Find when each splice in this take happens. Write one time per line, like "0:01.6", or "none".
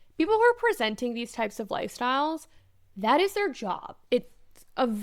0:03.9